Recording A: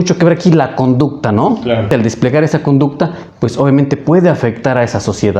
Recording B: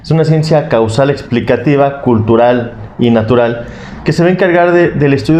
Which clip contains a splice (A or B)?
A